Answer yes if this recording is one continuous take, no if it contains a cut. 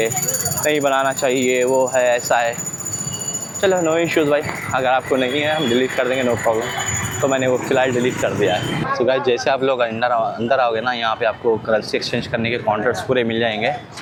yes